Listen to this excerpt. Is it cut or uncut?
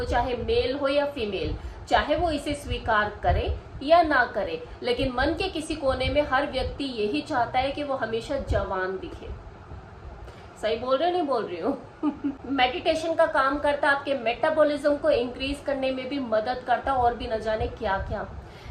cut